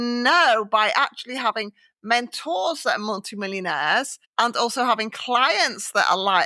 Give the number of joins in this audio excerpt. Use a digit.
1